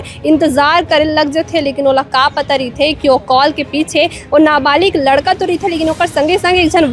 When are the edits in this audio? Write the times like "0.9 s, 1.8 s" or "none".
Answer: none